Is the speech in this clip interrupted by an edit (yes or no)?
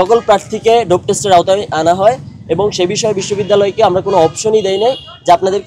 no